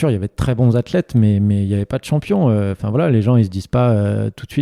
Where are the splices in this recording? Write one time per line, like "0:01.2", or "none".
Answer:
none